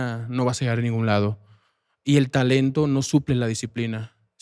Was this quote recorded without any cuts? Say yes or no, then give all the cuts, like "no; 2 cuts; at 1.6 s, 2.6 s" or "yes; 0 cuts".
yes; 0 cuts